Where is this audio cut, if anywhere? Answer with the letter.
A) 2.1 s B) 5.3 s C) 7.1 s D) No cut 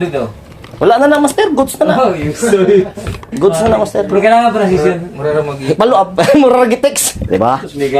C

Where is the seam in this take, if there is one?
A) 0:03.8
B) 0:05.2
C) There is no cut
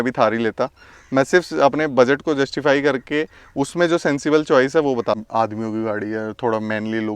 B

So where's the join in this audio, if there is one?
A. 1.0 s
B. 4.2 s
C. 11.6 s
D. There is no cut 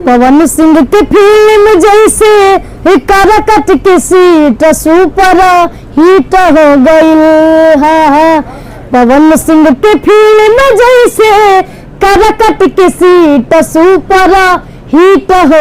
D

